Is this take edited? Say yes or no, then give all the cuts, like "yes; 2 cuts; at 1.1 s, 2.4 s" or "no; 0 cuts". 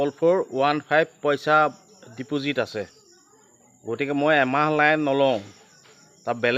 no; 0 cuts